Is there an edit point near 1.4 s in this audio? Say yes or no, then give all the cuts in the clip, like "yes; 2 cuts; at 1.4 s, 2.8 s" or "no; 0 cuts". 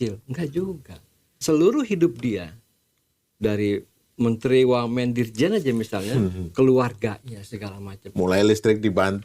yes; 1 cut; at 1.4 s